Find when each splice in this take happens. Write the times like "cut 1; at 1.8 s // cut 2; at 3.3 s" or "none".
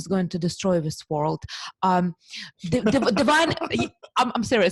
none